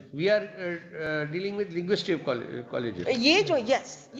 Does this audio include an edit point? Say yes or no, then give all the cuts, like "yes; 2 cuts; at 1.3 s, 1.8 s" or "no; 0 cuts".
no; 0 cuts